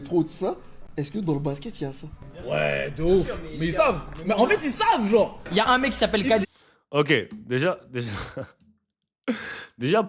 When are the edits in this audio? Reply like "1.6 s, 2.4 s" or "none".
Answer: none